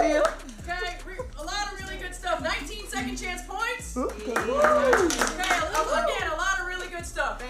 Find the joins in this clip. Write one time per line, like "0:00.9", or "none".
none

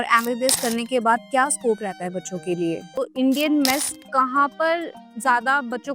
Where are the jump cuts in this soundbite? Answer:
0:02.9

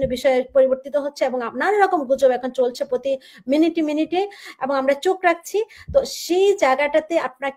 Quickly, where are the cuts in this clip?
none

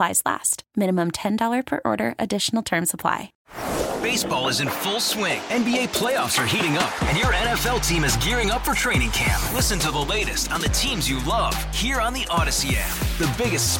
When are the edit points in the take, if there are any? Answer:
0:03.3

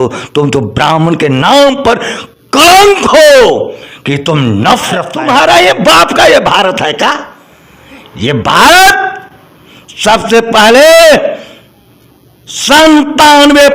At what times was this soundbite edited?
0:05.1

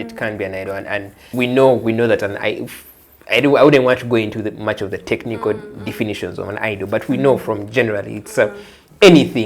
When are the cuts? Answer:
0:01.2

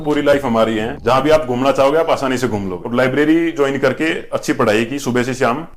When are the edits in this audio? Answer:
0:00.9
0:02.8

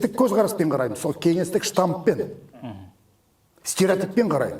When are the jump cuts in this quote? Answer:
none

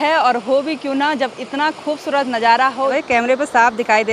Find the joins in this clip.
0:02.9

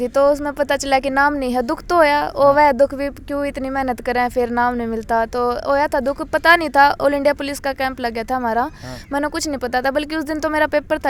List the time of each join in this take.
none

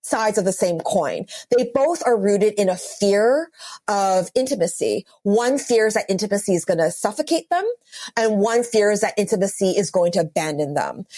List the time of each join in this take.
none

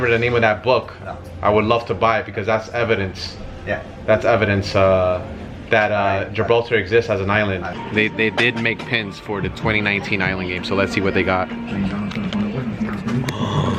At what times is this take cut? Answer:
0:07.7

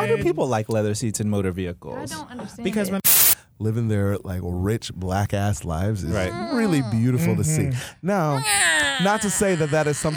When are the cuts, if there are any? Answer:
0:03.0

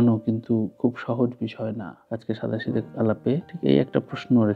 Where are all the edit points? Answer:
0:01.9

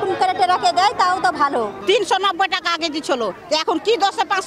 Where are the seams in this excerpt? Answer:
0:01.8

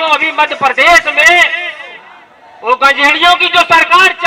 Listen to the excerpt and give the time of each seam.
none

